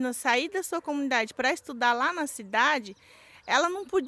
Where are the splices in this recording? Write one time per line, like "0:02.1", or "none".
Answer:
none